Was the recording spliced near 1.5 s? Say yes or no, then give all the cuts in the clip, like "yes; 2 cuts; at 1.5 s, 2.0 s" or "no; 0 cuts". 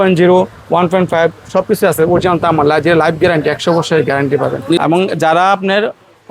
no; 1 cut; at 4.8 s